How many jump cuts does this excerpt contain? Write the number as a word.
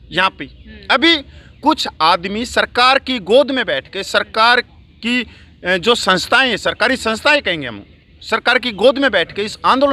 zero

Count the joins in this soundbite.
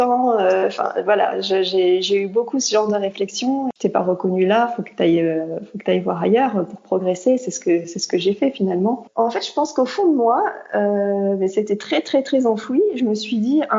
two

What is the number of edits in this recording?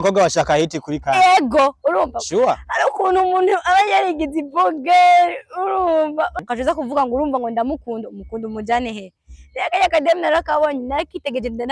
one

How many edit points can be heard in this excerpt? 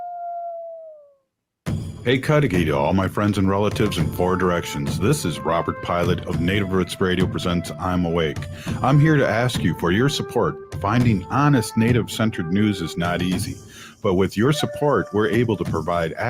one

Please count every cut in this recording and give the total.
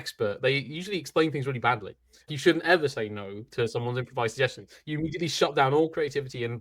one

